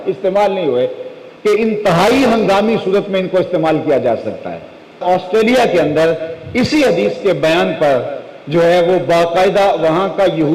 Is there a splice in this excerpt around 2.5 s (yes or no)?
no